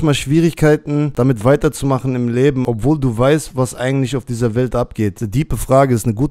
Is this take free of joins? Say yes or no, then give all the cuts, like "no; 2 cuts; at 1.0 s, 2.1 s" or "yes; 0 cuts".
no; 3 cuts; at 1.1 s, 2.6 s, 5.2 s